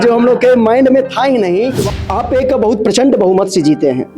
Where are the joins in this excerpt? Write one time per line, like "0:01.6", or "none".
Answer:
0:01.8